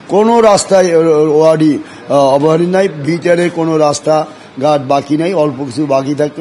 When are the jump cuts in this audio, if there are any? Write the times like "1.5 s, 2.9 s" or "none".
none

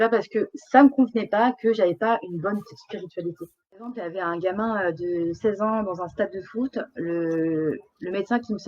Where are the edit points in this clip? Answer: 4.0 s

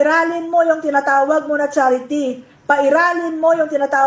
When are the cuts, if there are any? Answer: none

